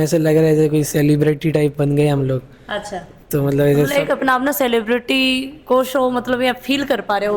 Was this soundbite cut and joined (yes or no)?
no